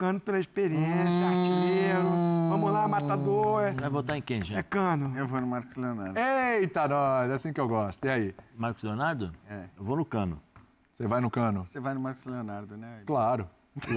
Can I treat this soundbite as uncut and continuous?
yes; 0 cuts

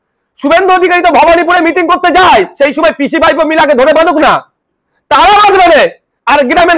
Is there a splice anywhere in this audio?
no; 0 cuts

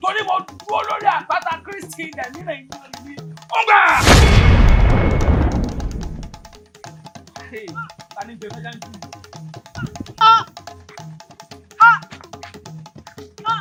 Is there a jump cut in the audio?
no; 0 cuts

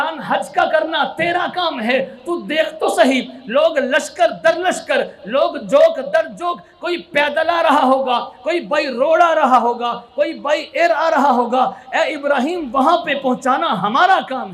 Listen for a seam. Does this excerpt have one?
no; 0 cuts

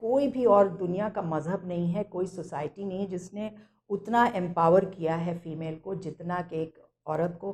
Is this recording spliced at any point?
no; 0 cuts

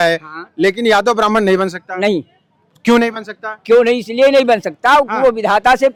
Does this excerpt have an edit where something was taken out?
no; 0 cuts

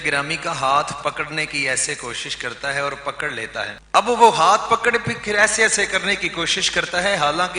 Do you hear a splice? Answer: yes; 1 cut; at 3.8 s

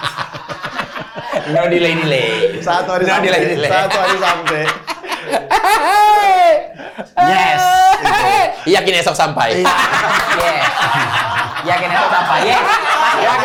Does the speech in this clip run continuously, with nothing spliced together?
yes; 0 cuts

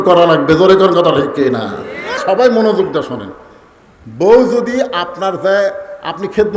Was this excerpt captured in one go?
no; 1 cut; at 2.2 s

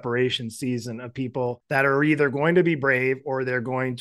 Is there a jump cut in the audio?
yes; 1 cut; at 1.6 s

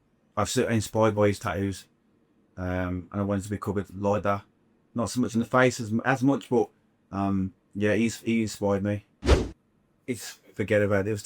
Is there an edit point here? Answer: yes; 1 cut; at 9.2 s

